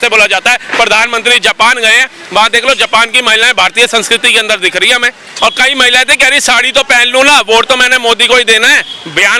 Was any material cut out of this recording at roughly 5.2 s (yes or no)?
yes